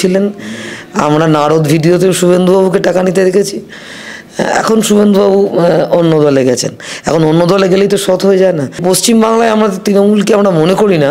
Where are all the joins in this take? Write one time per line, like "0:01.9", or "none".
0:08.8